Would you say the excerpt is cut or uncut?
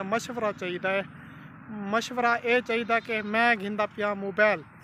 uncut